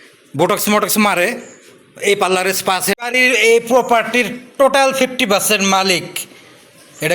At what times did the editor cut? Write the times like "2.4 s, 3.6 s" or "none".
3.0 s

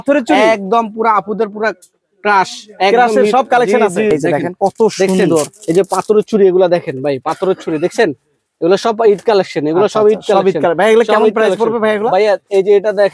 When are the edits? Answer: 4.1 s

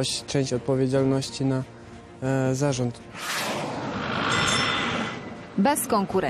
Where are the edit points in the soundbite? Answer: 2.9 s

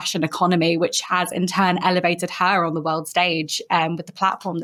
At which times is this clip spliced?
none

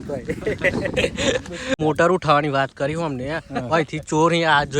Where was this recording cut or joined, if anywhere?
1.7 s

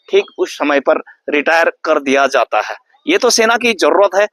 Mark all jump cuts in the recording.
none

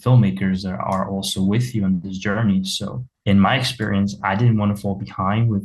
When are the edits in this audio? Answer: 3.1 s

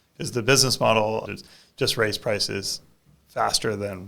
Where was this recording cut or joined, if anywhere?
1.2 s

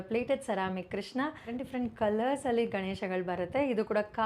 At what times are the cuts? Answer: 1.5 s

